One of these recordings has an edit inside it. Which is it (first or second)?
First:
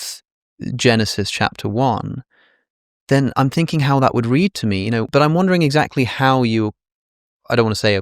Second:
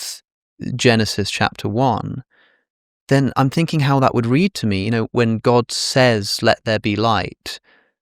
first